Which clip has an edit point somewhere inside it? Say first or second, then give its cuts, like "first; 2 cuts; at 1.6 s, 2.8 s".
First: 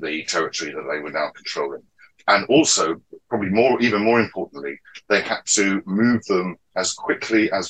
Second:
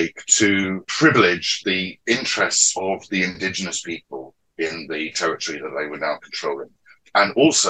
second; 2 cuts; at 0.9 s, 1.5 s